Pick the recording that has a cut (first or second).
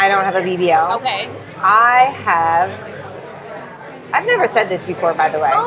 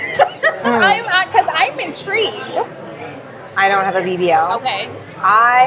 second